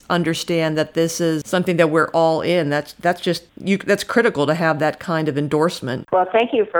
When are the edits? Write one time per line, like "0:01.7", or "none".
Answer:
0:01.4
0:03.5
0:05.9